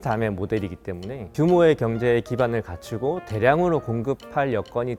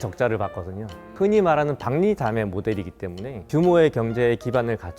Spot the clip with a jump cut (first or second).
second